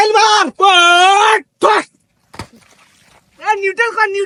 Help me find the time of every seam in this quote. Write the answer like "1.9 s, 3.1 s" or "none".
none

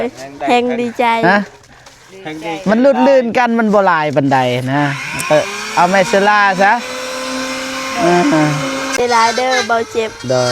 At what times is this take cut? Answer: 9.0 s

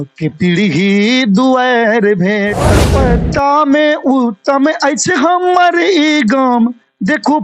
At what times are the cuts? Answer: 2.8 s

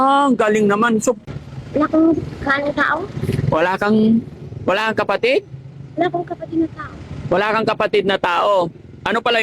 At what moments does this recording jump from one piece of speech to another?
1.3 s

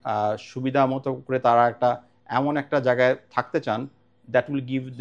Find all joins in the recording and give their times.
none

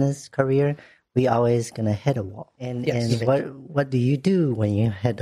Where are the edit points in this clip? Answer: 2.9 s

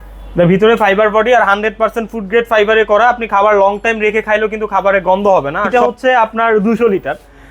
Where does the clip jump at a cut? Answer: 5.7 s

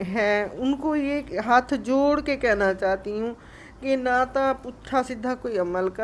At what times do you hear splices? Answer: none

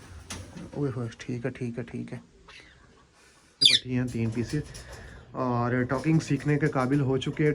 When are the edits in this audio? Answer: 3.7 s

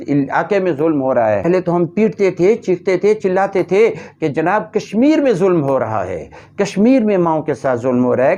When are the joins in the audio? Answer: 1.5 s

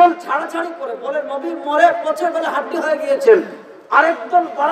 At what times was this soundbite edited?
none

